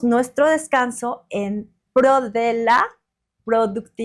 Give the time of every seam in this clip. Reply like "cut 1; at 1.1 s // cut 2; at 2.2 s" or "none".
none